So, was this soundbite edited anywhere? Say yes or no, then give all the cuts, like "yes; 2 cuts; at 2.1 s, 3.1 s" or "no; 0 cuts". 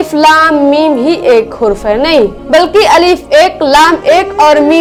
no; 0 cuts